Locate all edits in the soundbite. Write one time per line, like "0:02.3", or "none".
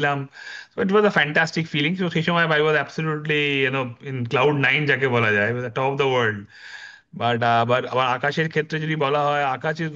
none